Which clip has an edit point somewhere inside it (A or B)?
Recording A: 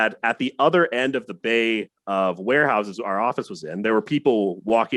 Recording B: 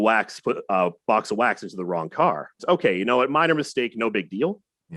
B